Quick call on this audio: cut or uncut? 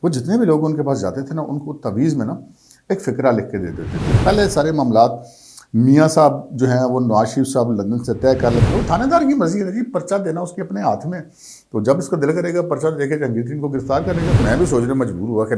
cut